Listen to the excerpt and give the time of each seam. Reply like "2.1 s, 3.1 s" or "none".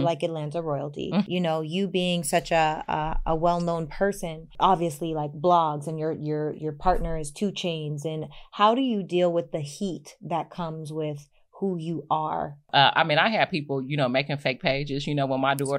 1.3 s, 4.4 s, 12.7 s